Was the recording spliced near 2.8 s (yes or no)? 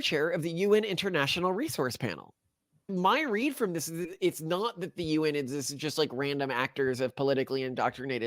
yes